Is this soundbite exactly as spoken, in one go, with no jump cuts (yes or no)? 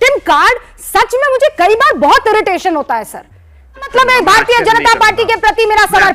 no